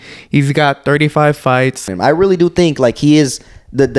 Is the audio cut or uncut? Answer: cut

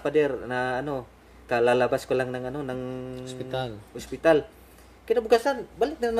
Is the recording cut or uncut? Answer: uncut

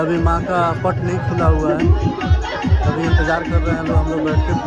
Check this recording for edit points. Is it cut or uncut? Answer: uncut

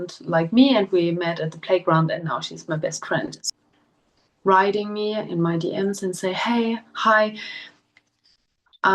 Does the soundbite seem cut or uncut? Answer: cut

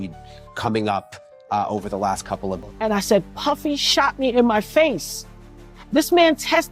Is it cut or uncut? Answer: cut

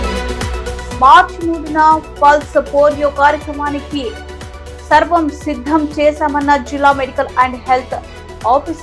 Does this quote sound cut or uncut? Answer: cut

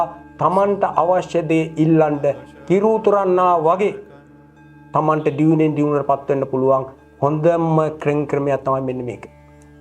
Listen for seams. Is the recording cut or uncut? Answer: uncut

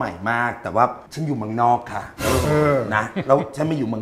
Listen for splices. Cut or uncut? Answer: uncut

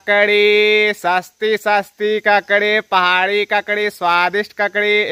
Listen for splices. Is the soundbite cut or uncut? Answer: uncut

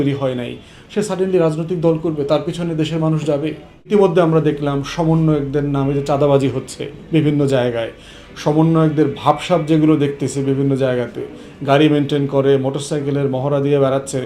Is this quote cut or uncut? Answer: cut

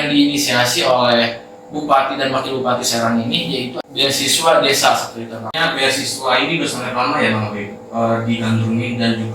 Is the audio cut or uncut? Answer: cut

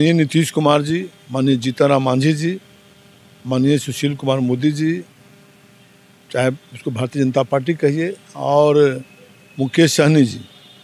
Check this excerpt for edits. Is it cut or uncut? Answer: uncut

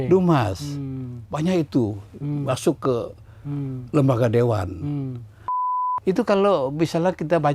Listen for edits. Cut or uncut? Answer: cut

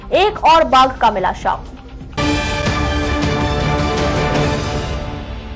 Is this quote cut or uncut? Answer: uncut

